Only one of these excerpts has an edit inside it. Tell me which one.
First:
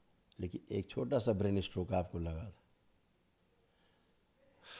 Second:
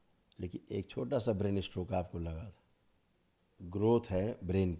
second; 1 cut; at 3.6 s

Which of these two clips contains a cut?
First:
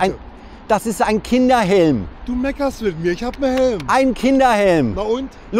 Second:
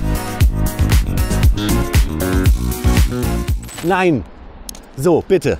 second; 1 cut; at 3.7 s

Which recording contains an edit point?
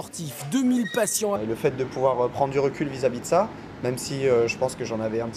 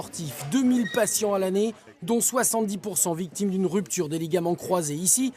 second; 1 cut; at 1.4 s

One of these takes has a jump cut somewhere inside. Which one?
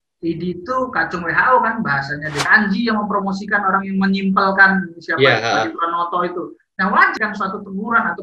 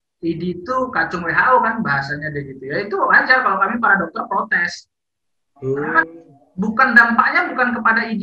first; 2 cuts; at 2.5 s, 7.1 s

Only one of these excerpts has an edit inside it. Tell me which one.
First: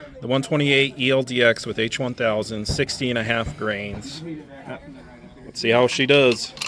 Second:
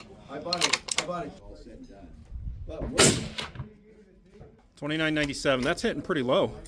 second; 2 cuts; at 1.4 s, 4.6 s

